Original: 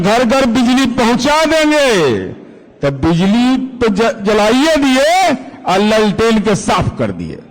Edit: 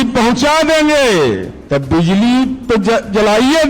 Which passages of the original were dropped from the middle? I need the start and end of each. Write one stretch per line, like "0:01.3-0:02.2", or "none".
0:02.4-0:02.6